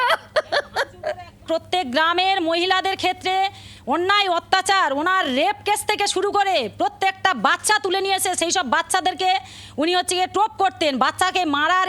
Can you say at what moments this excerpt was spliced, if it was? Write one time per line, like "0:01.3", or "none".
0:01.4